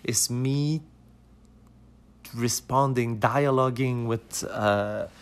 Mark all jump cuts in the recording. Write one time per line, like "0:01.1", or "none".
none